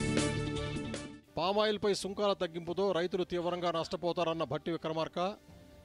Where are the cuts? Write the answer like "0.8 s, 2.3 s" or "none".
none